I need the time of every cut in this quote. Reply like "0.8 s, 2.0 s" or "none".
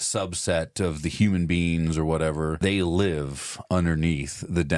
2.6 s